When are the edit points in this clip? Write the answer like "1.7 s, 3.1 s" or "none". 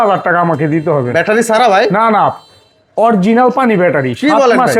none

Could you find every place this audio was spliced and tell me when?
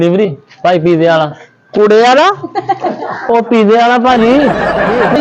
none

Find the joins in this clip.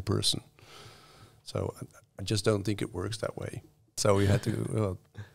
3.9 s

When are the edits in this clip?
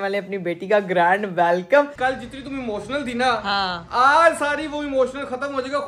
1.9 s

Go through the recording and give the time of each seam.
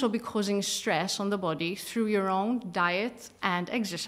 none

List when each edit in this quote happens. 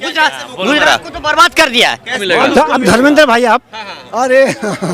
2.2 s

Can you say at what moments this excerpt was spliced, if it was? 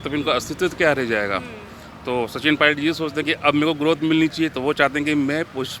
none

